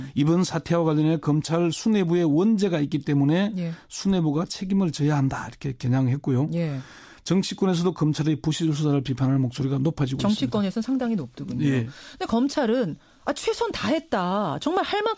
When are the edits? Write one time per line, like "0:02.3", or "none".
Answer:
none